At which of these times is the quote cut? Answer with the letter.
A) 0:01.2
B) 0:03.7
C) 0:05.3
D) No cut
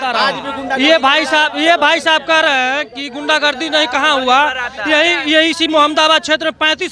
D